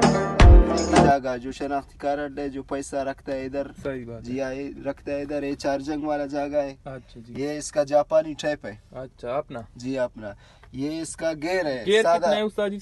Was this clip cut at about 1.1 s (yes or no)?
yes